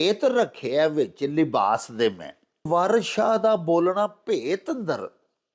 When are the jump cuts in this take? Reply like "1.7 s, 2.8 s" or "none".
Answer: 2.7 s